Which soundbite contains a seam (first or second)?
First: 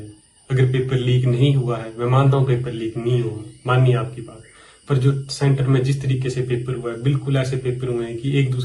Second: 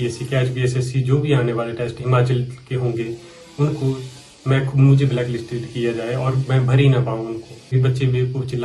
second